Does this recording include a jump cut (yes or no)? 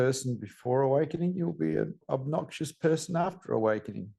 yes